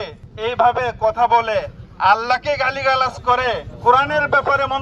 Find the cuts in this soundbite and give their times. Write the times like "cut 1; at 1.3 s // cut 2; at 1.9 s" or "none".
cut 1; at 3.7 s